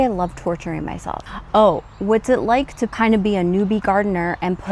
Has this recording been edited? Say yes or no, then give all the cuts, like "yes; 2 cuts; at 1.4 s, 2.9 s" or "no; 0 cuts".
yes; 1 cut; at 1.2 s